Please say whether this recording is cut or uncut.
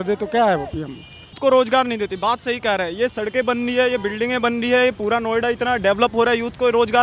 cut